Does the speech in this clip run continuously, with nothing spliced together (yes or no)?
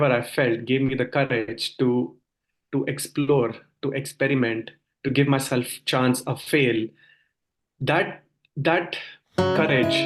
yes